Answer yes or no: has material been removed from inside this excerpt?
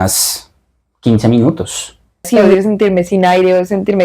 yes